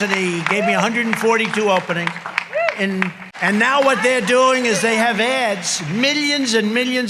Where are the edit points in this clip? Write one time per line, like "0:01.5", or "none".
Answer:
0:03.3